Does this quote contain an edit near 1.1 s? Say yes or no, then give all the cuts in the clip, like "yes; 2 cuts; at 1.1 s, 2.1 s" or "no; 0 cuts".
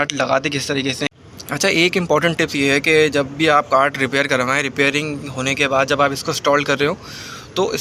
yes; 1 cut; at 1.1 s